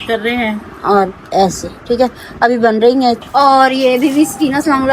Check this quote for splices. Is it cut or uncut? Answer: cut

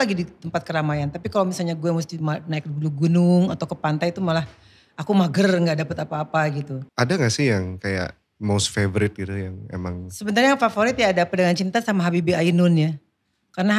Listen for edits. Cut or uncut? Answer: cut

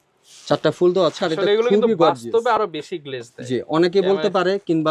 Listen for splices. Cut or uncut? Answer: uncut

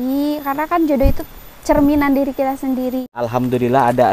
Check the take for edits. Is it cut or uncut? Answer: cut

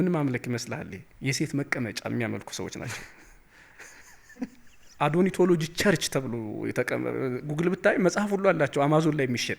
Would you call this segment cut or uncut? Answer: cut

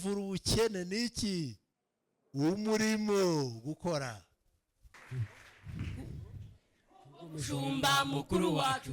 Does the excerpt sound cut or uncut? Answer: cut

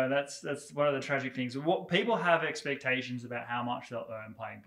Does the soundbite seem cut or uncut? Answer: uncut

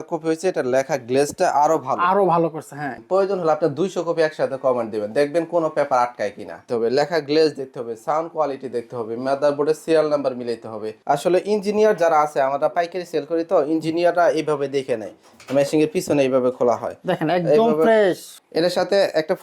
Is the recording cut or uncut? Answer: cut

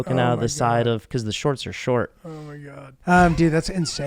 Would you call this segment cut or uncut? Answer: cut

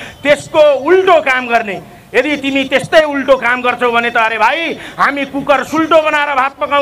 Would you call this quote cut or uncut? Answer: uncut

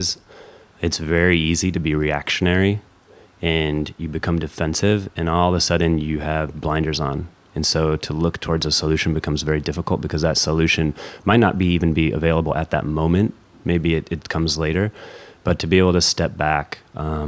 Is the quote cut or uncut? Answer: uncut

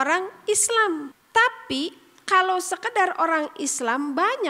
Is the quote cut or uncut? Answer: cut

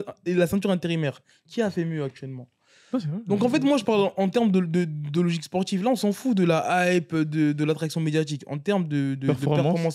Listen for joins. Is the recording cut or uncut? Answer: uncut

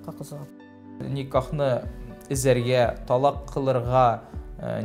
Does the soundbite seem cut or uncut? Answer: cut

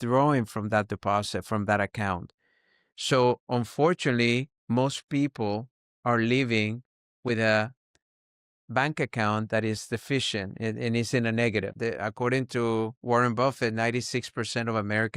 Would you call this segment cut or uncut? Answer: cut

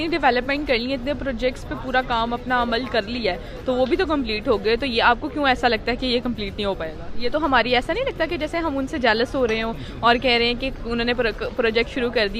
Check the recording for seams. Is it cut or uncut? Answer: uncut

